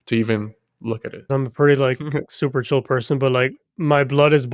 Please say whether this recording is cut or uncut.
cut